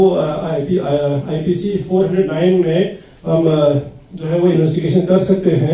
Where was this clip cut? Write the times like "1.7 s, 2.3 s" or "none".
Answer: none

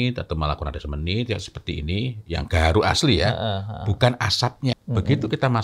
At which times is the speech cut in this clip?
4.7 s

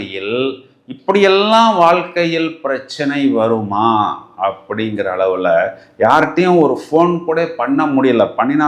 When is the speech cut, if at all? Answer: none

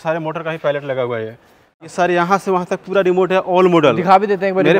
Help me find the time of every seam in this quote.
1.9 s

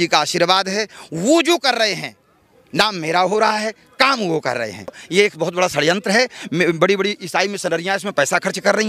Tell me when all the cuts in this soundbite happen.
5.0 s

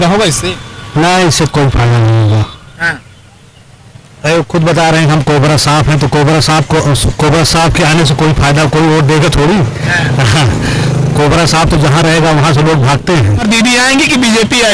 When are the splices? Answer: 13.4 s

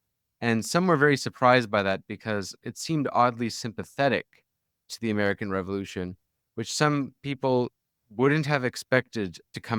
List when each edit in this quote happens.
2.6 s

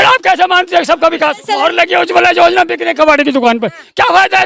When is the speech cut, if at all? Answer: 1.4 s

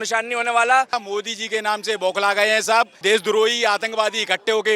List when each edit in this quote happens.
0.9 s, 2.9 s

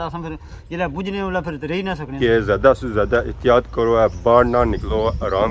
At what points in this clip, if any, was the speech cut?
2.1 s

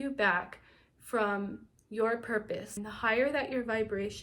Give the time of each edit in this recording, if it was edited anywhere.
2.8 s

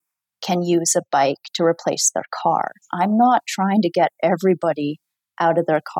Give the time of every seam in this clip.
2.8 s

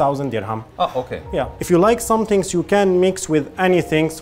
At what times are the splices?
1.6 s

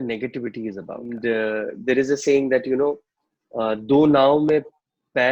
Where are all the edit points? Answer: 1.1 s

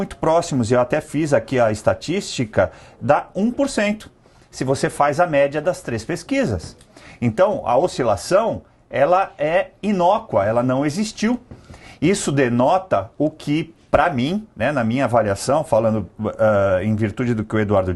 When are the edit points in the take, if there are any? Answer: none

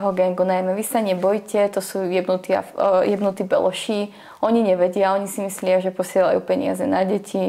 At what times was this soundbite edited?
none

